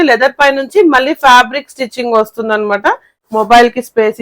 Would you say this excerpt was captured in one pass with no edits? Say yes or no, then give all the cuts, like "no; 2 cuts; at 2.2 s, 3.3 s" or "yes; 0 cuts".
no; 1 cut; at 3.1 s